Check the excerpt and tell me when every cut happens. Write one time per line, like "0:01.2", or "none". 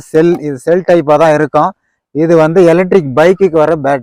none